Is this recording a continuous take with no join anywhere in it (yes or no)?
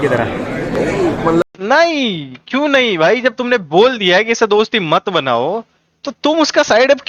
yes